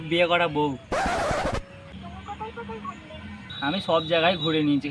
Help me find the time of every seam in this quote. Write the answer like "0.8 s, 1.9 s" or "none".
1.9 s, 3.7 s